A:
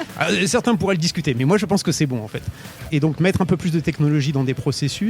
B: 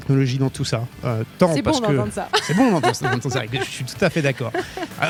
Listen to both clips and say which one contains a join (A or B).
A